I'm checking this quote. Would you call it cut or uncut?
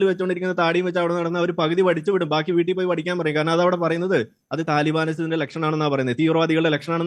uncut